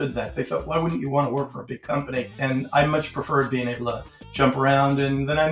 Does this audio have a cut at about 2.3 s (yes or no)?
yes